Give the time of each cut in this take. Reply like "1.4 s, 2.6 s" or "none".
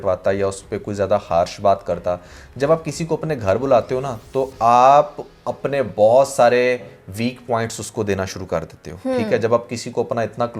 none